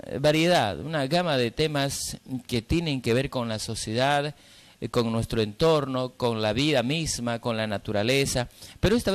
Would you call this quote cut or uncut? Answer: cut